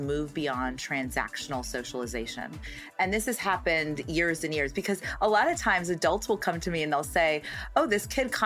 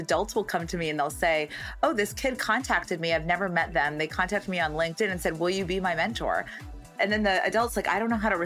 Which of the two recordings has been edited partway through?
second; 1 cut; at 6.9 s

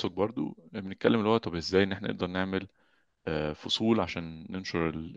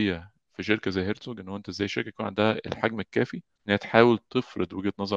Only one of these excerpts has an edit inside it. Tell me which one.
second; 1 cut; at 3.5 s

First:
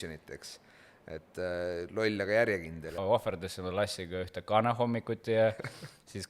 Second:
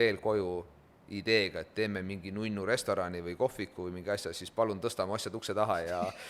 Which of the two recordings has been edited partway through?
first; 1 cut; at 3.0 s

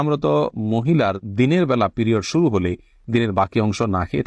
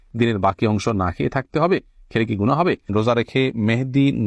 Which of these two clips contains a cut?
second; 1 cut; at 2.9 s

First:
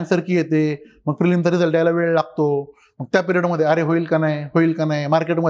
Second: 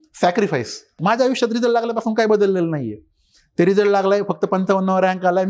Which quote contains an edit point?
second; 1 cut; at 1.0 s

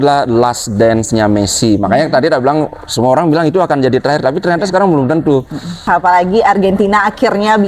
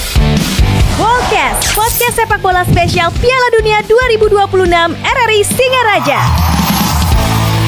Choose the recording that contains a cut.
first; 1 cut; at 5.8 s

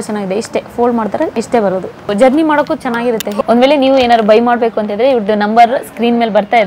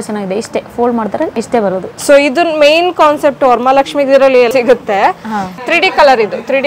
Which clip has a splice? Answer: second; 2 cuts; at 1.9 s, 4.5 s

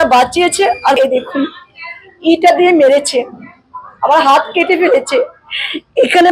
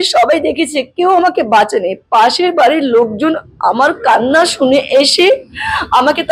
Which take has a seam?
first; 1 cut; at 1.0 s

